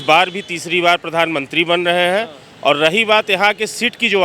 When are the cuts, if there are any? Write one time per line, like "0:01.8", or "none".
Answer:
none